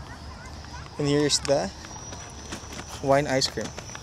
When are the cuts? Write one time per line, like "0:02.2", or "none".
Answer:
none

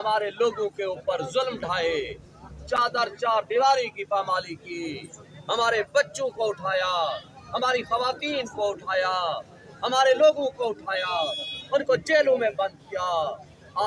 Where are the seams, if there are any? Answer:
none

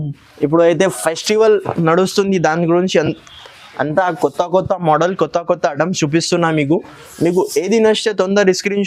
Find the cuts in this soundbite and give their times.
none

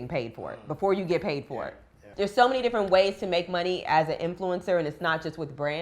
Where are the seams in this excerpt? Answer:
0:02.1

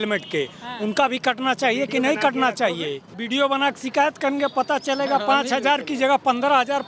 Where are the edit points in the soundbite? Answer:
0:03.1

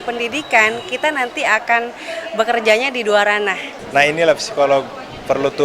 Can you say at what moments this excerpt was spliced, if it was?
0:03.7

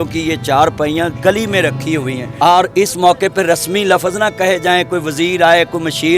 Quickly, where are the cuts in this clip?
0:02.2

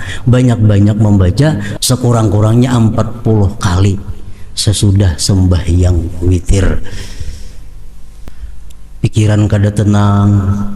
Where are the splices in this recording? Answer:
0:01.7
0:08.3

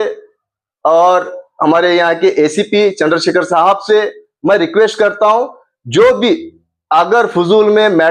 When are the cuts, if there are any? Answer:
none

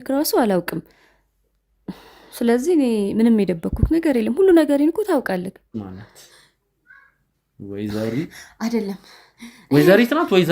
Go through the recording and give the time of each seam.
0:05.7

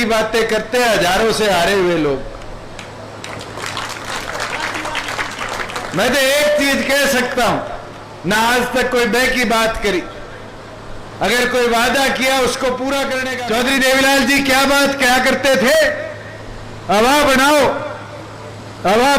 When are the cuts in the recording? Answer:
0:13.3

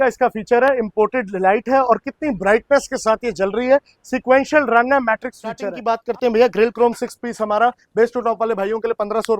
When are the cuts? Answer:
0:05.7

